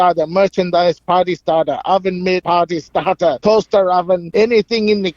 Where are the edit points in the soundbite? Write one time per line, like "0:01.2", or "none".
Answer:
0:02.4
0:03.4
0:04.3